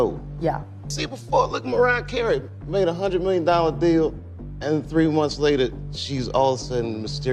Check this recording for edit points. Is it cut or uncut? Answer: cut